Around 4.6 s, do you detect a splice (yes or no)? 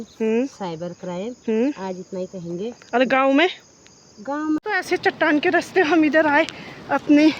yes